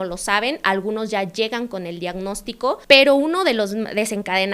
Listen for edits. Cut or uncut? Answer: cut